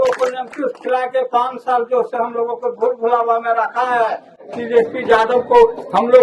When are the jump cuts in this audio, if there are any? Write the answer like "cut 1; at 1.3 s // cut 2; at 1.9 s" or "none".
cut 1; at 4.4 s